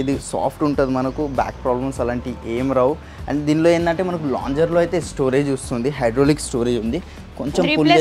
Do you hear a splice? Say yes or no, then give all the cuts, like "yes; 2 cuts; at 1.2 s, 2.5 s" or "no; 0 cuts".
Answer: no; 0 cuts